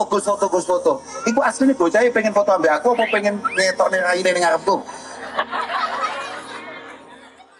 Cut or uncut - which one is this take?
uncut